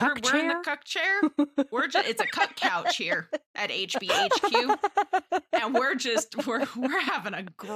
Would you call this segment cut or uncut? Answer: uncut